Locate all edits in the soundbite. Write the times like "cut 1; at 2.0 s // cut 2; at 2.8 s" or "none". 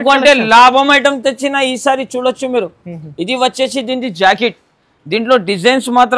none